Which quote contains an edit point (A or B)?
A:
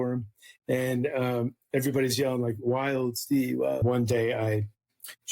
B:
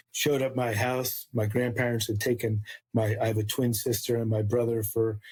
A